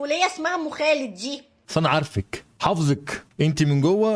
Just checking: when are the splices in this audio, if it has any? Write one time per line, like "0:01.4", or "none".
none